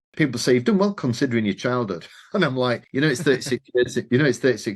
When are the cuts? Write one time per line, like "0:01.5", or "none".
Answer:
0:02.8